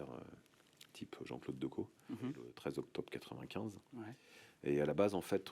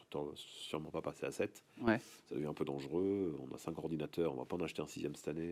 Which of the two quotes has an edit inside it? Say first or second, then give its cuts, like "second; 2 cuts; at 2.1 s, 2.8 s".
first; 1 cut; at 2.5 s